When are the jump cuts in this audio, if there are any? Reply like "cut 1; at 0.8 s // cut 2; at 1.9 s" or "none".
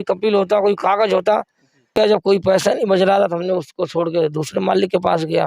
cut 1; at 1.9 s